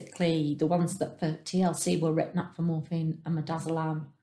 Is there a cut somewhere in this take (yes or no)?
no